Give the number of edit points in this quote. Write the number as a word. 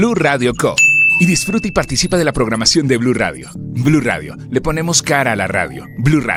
zero